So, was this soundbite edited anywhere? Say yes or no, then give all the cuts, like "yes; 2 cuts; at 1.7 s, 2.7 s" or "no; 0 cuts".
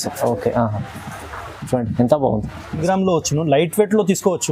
yes; 1 cut; at 2.8 s